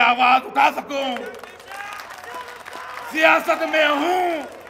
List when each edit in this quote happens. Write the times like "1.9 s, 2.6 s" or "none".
none